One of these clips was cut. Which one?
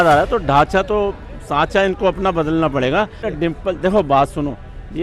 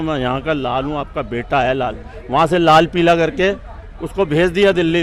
first; 1 cut; at 3.2 s

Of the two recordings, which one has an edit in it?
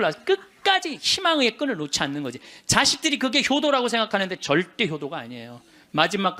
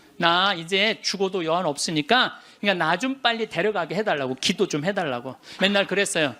second; 2 cuts; at 2.5 s, 5.4 s

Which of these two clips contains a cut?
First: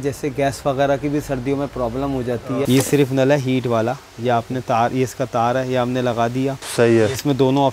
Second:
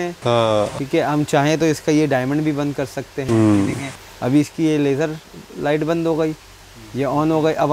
first; 1 cut; at 2.7 s

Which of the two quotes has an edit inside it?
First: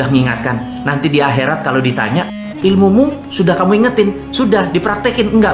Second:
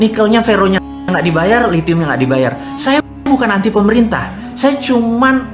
first; 1 cut; at 2.4 s

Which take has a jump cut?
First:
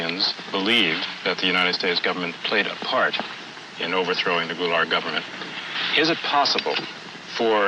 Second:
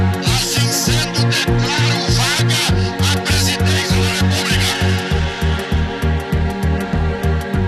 first; 1 cut; at 2.5 s

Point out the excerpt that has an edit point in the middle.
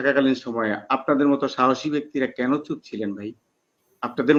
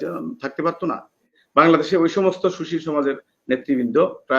second; 1 cut; at 1.4 s

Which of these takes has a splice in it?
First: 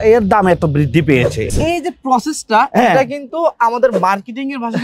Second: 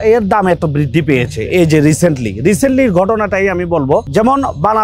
first; 1 cut; at 1.5 s

